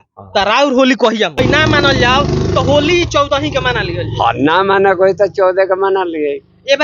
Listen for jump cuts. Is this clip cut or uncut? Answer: cut